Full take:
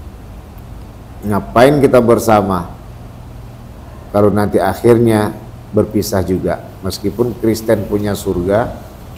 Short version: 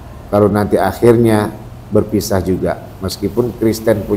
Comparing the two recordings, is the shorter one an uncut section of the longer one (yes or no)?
yes